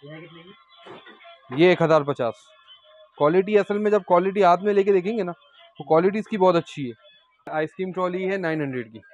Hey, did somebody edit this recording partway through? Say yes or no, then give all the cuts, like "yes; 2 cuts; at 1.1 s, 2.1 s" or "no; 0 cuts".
yes; 1 cut; at 7.5 s